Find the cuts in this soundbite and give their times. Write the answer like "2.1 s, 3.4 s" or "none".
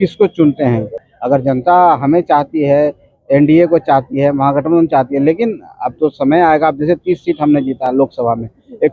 1.0 s